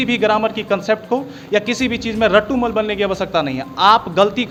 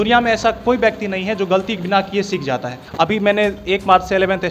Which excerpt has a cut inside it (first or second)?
second